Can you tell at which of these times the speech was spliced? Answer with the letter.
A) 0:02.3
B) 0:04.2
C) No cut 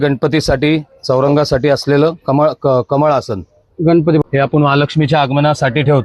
B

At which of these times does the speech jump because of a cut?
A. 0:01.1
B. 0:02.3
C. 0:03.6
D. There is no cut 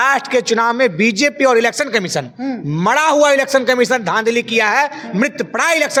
D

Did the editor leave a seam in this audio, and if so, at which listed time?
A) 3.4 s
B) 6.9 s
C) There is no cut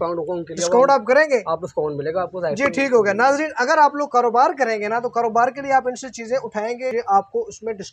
B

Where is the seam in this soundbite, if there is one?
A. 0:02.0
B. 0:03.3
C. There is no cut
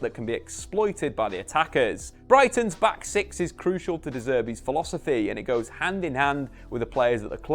A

